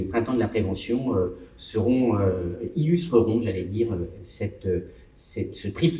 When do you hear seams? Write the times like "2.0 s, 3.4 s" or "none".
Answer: none